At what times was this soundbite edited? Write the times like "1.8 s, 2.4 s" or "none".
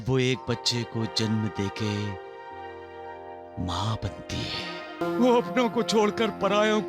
5.0 s